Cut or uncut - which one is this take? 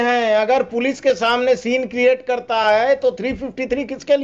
uncut